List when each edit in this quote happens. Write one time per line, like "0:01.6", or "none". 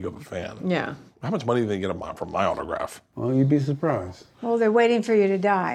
0:03.0